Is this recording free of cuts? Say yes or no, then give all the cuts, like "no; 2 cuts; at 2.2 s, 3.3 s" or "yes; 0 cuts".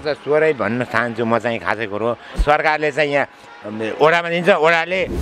no; 1 cut; at 2.3 s